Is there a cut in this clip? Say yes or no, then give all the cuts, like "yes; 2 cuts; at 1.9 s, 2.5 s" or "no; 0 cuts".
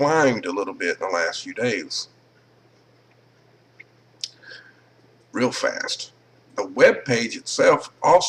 no; 0 cuts